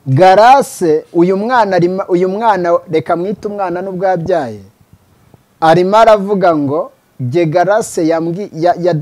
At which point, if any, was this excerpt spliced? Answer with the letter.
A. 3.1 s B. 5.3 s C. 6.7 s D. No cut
D